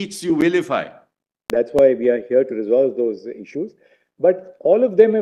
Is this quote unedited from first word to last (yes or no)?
no